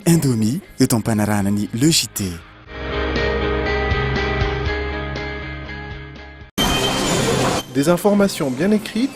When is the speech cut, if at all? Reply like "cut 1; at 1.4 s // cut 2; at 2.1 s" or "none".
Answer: none